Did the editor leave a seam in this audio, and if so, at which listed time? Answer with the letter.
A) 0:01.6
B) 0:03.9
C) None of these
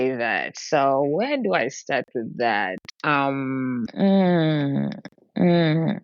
B